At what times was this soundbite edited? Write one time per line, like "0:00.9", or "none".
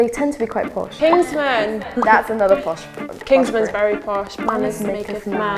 0:00.9
0:04.3